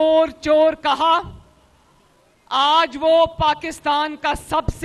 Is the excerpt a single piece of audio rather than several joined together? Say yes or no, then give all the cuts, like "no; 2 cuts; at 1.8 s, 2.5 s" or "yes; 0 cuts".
yes; 0 cuts